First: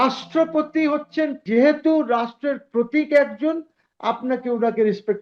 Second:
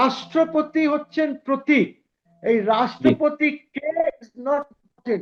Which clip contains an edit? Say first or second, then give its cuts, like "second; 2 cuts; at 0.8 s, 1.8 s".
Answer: first; 1 cut; at 1.4 s